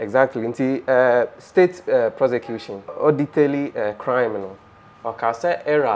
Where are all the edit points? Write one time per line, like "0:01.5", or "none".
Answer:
0:03.0